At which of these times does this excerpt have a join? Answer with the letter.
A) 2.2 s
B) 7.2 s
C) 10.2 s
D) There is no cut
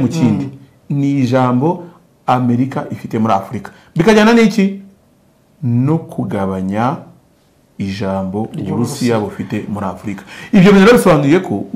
D